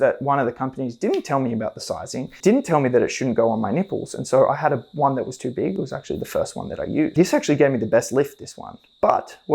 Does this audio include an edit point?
yes; 2 cuts; at 2.4 s, 7.1 s

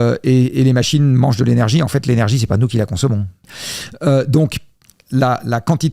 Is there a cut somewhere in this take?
yes; 1 cut; at 3.5 s

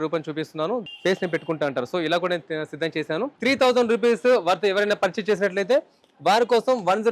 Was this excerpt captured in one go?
no; 2 cuts; at 0.9 s, 3.3 s

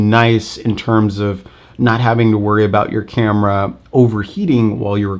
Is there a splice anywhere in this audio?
no; 0 cuts

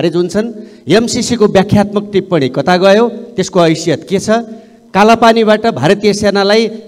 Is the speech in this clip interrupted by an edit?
no; 0 cuts

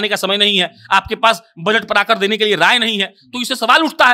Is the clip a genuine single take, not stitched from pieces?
yes; 0 cuts

